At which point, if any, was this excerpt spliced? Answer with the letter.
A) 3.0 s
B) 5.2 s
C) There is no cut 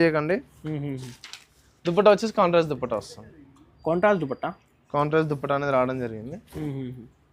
C